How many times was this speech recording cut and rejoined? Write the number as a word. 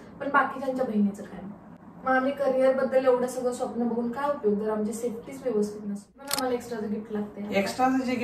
one